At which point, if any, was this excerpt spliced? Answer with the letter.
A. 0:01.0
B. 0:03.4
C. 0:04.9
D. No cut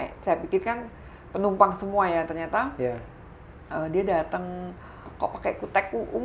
D